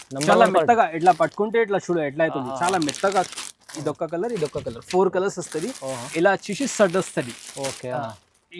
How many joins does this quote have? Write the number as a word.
one